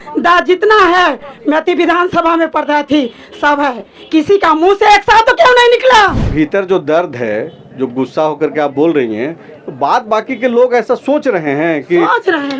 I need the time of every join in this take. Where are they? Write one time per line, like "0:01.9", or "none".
0:06.2